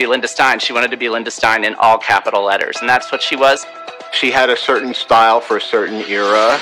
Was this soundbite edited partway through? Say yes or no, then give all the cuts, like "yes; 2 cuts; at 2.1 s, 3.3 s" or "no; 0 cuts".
yes; 1 cut; at 4.0 s